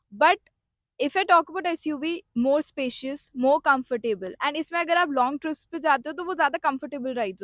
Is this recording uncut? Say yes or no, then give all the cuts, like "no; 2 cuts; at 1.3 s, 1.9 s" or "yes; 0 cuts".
yes; 0 cuts